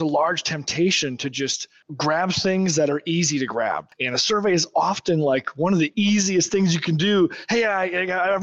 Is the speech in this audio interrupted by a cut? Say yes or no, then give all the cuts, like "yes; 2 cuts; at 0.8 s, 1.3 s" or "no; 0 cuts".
yes; 2 cuts; at 1.8 s, 3.8 s